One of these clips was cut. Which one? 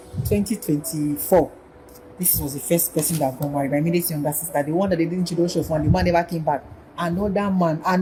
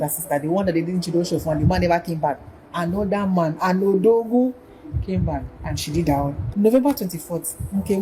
second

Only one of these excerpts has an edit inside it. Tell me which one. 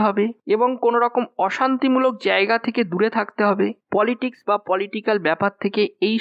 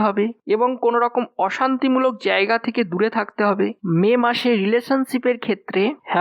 second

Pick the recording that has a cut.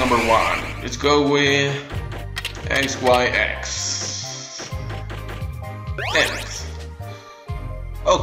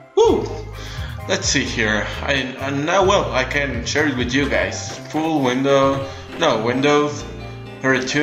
first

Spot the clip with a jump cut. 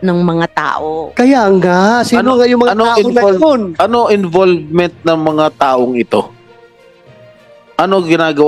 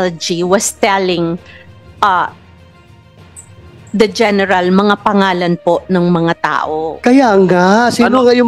first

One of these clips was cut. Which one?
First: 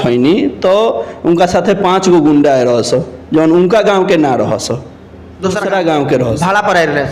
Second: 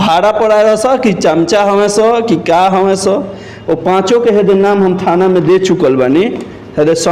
first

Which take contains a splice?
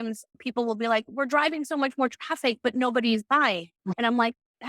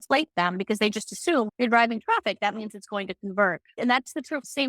second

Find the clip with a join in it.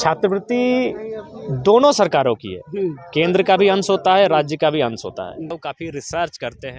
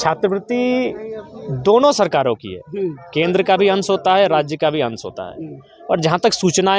first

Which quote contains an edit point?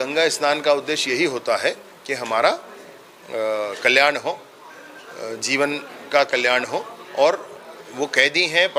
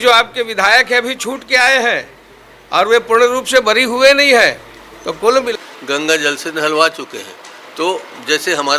second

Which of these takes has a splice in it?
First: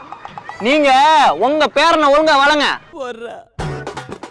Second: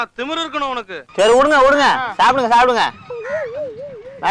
first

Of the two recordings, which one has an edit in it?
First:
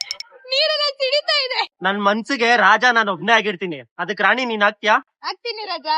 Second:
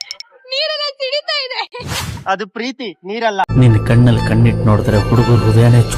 first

